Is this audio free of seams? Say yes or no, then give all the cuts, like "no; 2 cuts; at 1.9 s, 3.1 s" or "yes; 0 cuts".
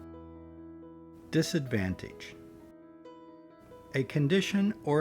no; 2 cuts; at 2.1 s, 3.5 s